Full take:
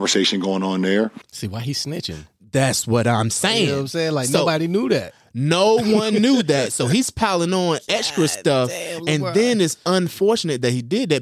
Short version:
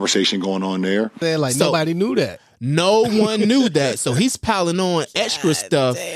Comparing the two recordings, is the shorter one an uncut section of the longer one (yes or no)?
no